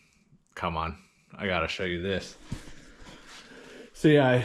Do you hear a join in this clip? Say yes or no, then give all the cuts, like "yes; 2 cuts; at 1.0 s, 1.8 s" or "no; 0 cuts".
no; 0 cuts